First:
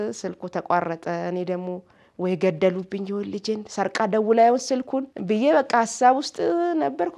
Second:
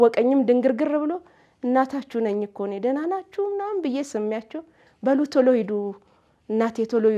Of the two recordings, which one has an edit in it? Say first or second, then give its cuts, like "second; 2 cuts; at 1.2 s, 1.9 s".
first; 1 cut; at 5.1 s